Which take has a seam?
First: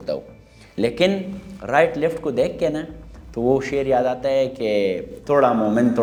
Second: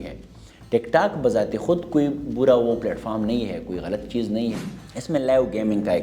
second; 1 cut; at 4.6 s

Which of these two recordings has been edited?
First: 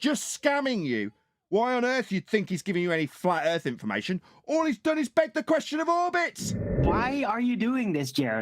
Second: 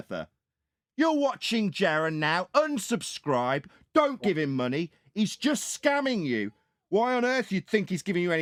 first; 1 cut; at 6.8 s

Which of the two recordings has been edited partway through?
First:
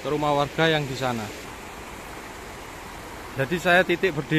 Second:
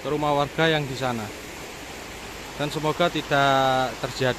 first; 1 cut; at 1.4 s

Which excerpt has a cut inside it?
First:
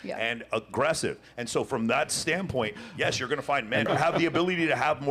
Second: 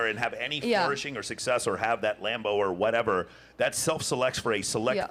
first; 1 cut; at 3.9 s

